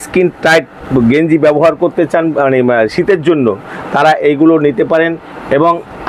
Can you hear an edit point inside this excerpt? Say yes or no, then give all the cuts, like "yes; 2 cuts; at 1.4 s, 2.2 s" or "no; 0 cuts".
no; 0 cuts